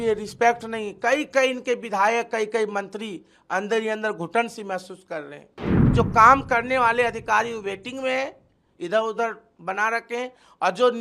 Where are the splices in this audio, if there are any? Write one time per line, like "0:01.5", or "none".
0:05.9